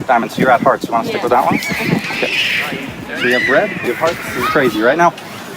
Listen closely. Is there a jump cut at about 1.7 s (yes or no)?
no